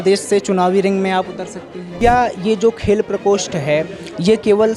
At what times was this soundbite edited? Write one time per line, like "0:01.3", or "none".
0:01.8